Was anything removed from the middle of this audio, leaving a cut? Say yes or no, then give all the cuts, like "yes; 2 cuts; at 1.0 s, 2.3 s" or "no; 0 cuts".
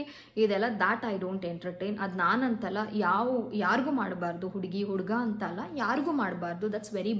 no; 0 cuts